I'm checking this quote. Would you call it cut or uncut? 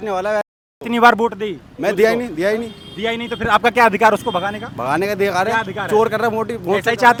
uncut